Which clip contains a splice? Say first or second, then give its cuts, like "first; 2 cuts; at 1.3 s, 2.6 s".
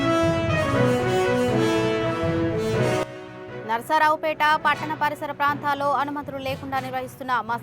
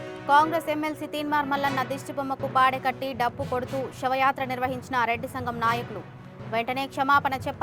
first; 1 cut; at 3.2 s